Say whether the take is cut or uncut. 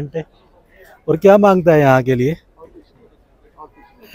uncut